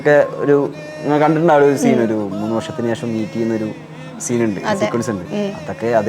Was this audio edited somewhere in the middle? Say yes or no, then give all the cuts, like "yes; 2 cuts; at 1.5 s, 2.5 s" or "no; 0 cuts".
no; 0 cuts